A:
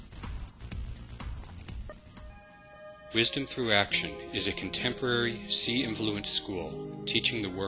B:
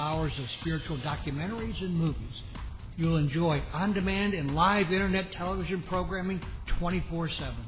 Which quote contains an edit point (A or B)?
A